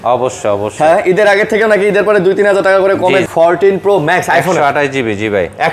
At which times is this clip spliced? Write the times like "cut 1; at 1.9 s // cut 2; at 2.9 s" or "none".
cut 1; at 3.3 s

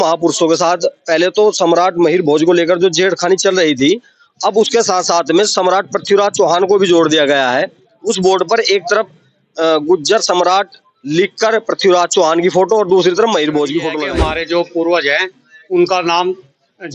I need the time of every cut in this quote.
cut 1; at 14.0 s

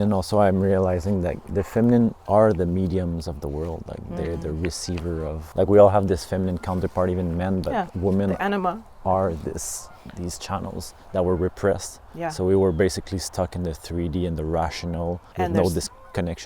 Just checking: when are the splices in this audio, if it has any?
cut 1; at 1.5 s // cut 2; at 2.2 s // cut 3; at 5.4 s // cut 4; at 15.2 s

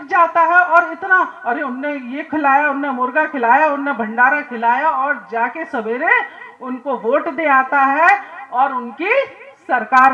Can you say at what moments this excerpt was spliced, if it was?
none

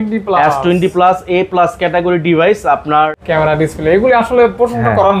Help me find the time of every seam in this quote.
cut 1; at 3.2 s

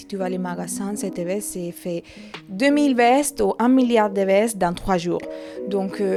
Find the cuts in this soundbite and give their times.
none

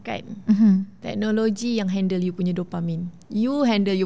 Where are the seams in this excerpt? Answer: none

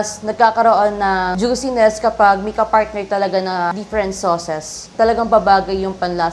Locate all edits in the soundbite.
cut 1; at 1.3 s // cut 2; at 3.7 s // cut 3; at 4.9 s

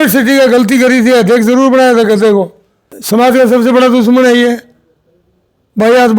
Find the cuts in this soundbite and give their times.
cut 1; at 2.9 s

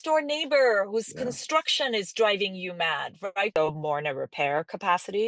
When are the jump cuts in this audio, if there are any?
cut 1; at 3.6 s

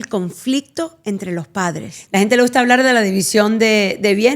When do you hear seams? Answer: cut 1; at 2.0 s

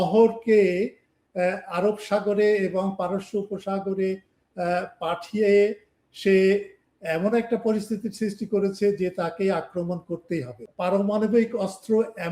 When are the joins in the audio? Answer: cut 1; at 10.6 s

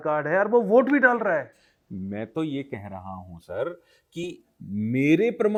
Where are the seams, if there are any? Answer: none

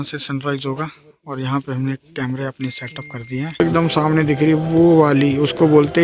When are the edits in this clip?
cut 1; at 3.6 s

